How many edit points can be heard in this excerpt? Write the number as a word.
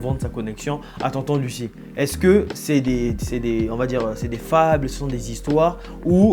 zero